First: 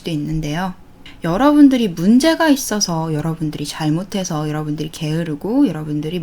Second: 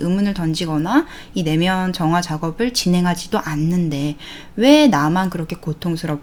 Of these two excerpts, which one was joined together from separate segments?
first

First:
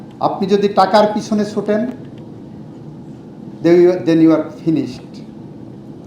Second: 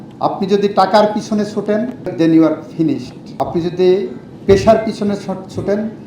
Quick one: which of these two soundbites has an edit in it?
second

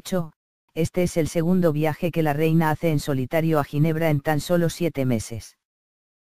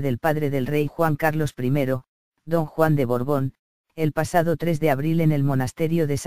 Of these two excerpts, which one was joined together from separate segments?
first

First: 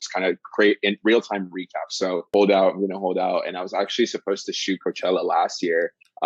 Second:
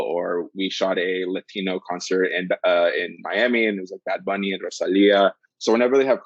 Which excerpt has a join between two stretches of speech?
first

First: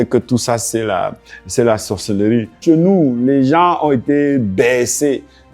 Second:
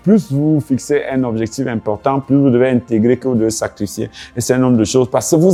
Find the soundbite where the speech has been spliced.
first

